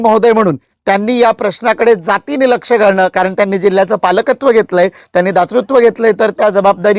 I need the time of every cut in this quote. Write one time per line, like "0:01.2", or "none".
none